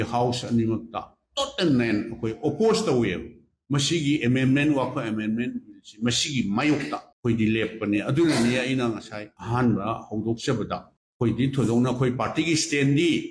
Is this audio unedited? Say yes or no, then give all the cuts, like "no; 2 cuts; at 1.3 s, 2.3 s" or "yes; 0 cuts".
yes; 0 cuts